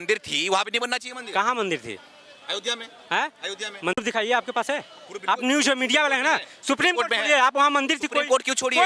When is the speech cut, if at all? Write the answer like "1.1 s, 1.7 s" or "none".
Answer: none